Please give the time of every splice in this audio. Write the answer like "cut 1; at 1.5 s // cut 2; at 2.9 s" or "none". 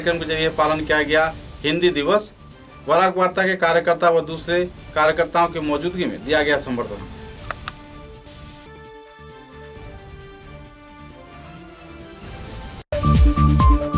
cut 1; at 12.8 s